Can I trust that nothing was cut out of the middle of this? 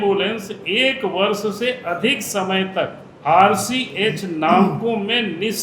no; 1 cut; at 3.1 s

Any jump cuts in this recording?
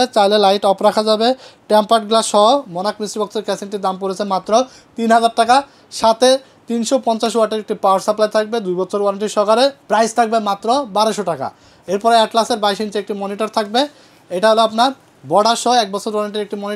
no; 0 cuts

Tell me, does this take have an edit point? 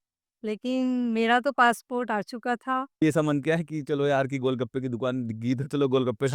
yes; 1 cut; at 3.0 s

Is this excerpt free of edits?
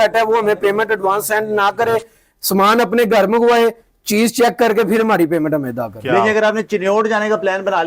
no; 1 cut; at 5.9 s

